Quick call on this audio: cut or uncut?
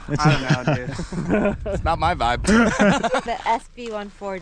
cut